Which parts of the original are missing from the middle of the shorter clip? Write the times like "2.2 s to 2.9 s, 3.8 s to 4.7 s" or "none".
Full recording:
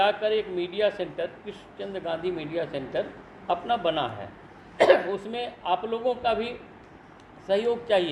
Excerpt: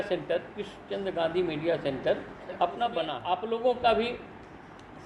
4.0 s to 5.5 s

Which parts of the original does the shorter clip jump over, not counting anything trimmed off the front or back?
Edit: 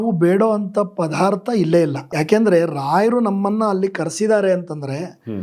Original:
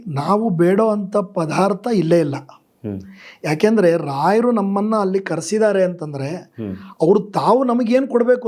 2.4 s to 3.3 s

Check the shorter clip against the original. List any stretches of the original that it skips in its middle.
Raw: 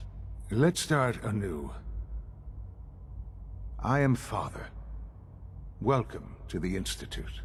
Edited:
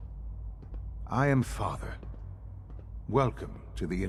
none

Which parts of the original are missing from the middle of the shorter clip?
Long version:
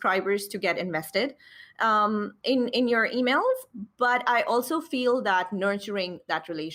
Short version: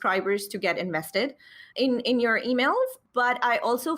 1.7 s to 2.3 s, 3.7 s to 3.9 s

